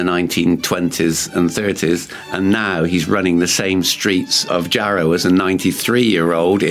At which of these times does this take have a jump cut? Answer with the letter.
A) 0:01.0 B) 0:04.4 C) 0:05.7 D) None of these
B